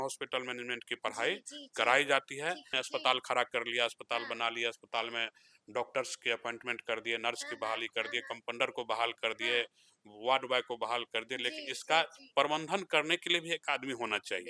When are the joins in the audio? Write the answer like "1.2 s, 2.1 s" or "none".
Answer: 2.8 s